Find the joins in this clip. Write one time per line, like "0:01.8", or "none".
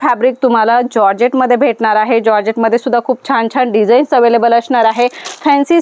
none